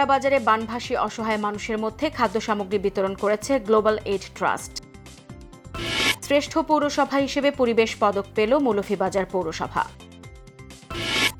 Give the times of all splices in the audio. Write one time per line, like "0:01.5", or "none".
none

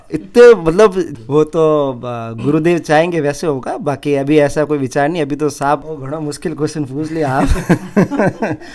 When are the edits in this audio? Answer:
0:01.1
0:05.9

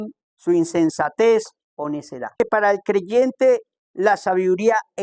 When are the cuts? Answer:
0:02.4

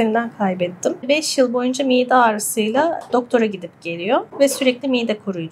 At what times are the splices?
0:01.1

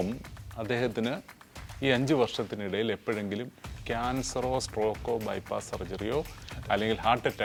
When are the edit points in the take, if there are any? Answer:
none

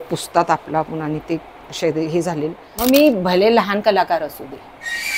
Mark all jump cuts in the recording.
0:02.6

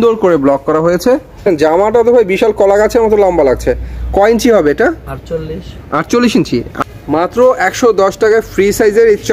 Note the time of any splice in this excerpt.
0:01.4
0:06.8

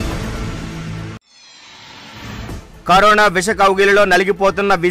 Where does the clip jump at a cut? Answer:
0:01.0
0:02.2

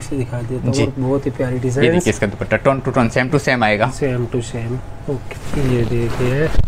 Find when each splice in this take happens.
0:05.2

